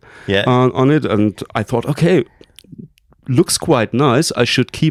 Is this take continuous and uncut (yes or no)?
yes